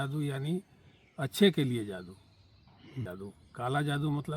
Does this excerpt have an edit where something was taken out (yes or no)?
yes